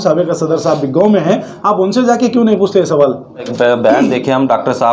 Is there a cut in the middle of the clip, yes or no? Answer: yes